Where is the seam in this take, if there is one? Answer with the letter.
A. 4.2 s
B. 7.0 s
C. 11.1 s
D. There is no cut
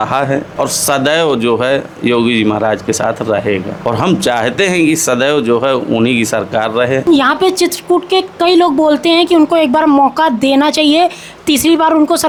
D